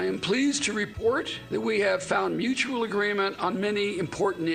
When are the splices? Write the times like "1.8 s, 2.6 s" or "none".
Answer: none